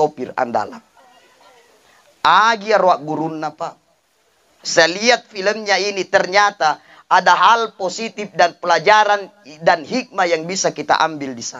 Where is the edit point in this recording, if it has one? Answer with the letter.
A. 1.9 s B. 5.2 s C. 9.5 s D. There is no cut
D